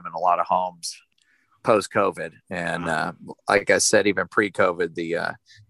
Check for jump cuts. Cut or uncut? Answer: cut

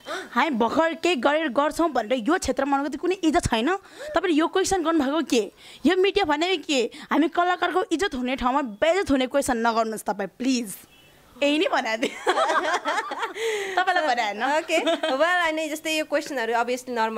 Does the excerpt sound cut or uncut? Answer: uncut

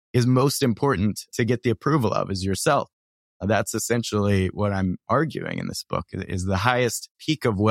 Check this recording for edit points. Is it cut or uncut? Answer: cut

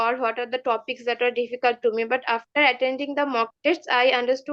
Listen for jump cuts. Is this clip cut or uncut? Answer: uncut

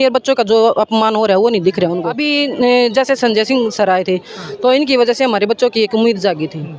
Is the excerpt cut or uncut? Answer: cut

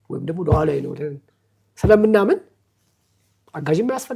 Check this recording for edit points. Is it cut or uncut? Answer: uncut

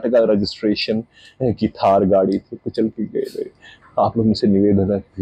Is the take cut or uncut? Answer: uncut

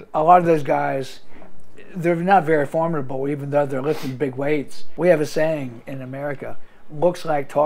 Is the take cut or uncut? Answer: cut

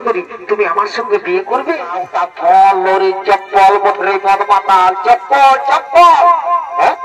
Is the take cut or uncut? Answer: cut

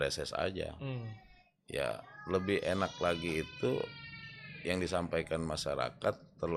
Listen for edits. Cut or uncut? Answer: uncut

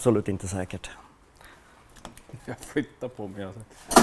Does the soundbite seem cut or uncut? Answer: uncut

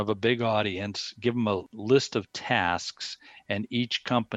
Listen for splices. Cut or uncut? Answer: cut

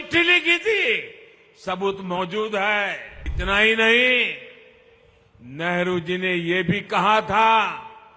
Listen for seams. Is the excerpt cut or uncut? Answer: cut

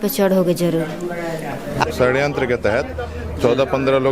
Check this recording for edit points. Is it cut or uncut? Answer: cut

